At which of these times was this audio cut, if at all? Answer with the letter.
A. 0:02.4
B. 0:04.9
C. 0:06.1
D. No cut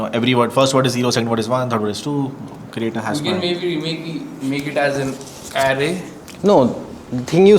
D